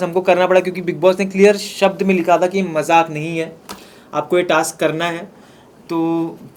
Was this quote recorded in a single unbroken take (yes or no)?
yes